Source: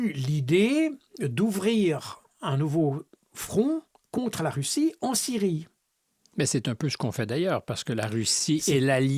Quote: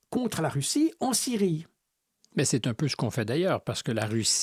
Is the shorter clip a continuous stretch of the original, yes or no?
yes